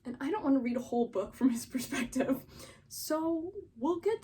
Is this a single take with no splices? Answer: yes; 0 cuts

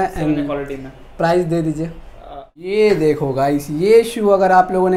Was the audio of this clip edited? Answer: yes; 1 cut; at 2.7 s

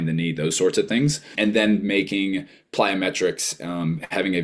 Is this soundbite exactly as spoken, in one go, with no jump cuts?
no; 1 cut; at 1.3 s

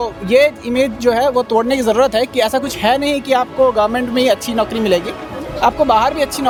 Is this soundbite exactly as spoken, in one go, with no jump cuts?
yes; 0 cuts

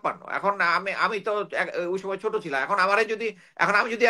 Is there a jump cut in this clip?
no; 0 cuts

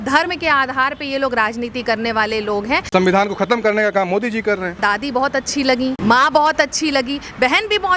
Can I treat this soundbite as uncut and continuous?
no; 3 cuts; at 2.9 s, 4.8 s, 6.0 s

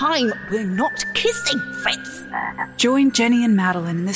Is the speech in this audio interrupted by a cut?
yes; 1 cut; at 2.7 s

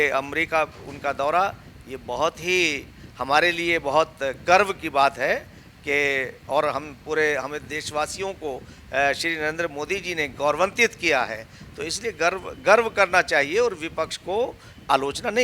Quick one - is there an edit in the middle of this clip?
no; 0 cuts

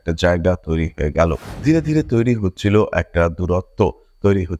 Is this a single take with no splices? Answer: no; 1 cut; at 1.5 s

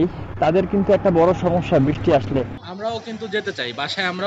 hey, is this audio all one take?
no; 1 cut; at 2.6 s

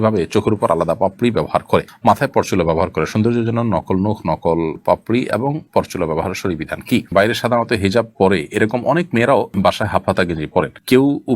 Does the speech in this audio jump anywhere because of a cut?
yes; 1 cut; at 7.1 s

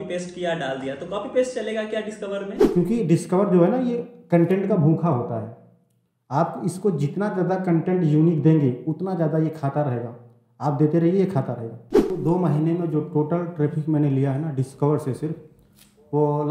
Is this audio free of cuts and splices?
no; 2 cuts; at 2.6 s, 12.1 s

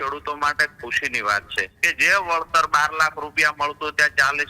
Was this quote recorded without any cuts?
no; 1 cut; at 1.7 s

